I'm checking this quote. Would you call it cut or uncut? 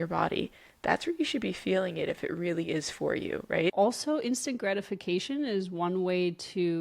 cut